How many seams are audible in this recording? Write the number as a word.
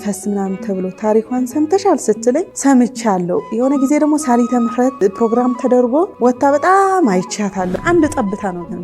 four